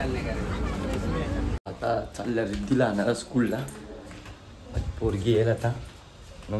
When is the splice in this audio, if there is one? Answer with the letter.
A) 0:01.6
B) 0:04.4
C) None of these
C